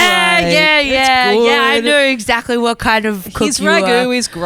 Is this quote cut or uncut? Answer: uncut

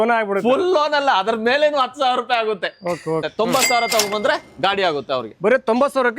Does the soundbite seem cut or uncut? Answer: cut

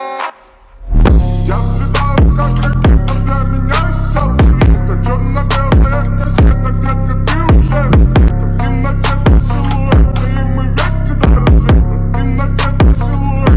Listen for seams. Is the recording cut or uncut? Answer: uncut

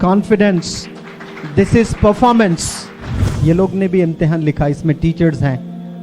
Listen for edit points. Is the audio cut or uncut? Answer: cut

